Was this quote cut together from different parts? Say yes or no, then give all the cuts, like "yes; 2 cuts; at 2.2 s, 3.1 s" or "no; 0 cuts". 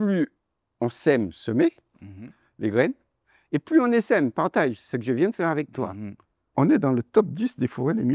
yes; 1 cut; at 6.5 s